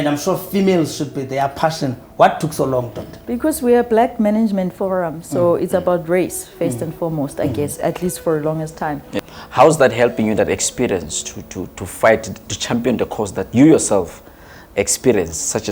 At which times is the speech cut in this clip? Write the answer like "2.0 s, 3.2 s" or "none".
9.1 s